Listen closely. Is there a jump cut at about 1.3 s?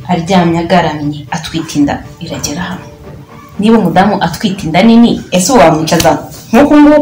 yes; 1 cut; at 1.3 s

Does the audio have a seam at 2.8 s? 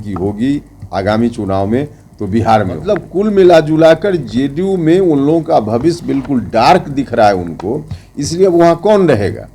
yes; 1 cut; at 2.8 s

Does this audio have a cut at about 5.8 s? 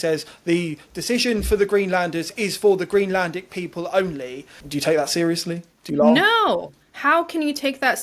no; 1 cut; at 4.5 s

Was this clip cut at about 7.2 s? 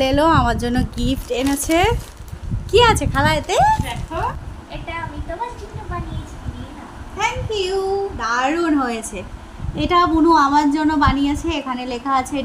no; 1 cut; at 4.5 s

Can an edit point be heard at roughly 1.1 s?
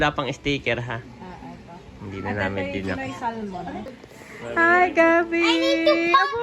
no; 1 cut; at 3.9 s

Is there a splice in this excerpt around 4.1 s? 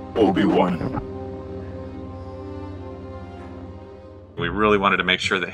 yes; 1 cut; at 4.1 s

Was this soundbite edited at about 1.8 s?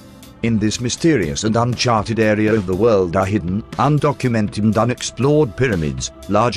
yes; 1 cut; at 1.8 s

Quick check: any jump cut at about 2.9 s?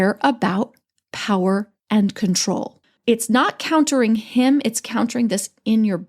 yes; 2 cuts; at 1.8 s, 2.9 s

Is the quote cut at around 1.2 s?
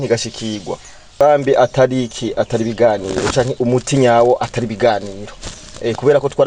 yes; 1 cut; at 1.2 s

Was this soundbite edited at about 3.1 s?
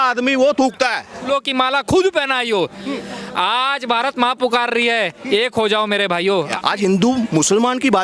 no; 2 cuts; at 1.3 s, 6.5 s

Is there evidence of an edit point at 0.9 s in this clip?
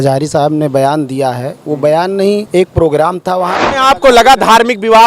no; 2 cuts; at 2.5 s, 3.6 s

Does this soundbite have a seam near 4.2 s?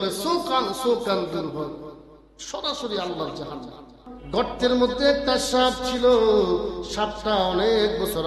yes; 1 cut; at 4.2 s

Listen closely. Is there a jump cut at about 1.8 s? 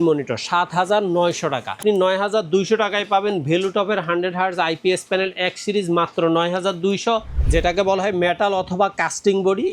yes; 2 cuts; at 1.8 s, 7.4 s

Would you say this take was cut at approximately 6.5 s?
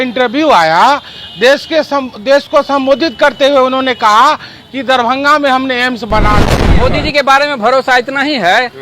yes; 1 cut; at 6.5 s

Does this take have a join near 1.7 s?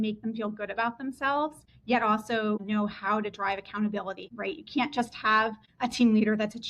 yes; 4 cuts; at 1.7 s, 2.6 s, 4.3 s, 5.6 s

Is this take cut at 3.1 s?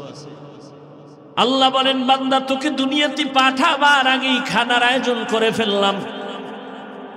no; 1 cut; at 1.3 s

